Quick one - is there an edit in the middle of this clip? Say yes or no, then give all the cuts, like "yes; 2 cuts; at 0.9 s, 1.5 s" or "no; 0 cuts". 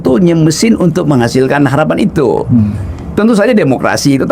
no; 0 cuts